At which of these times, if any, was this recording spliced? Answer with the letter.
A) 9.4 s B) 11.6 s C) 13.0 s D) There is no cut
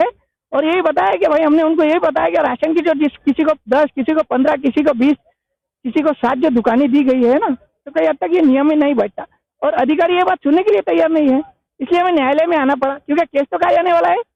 D